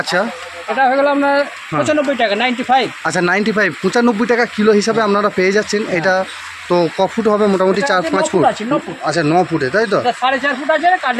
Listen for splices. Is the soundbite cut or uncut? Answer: uncut